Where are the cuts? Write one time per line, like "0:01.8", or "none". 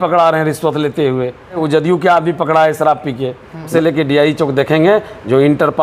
0:01.6
0:03.7